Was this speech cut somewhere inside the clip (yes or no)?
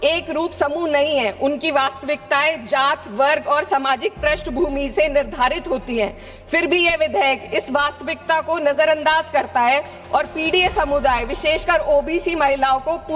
no